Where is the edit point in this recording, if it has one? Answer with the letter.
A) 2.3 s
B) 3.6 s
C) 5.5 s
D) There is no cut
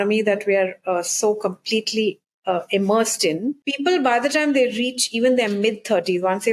B